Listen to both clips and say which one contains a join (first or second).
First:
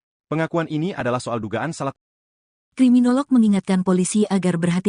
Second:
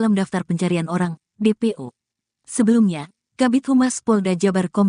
first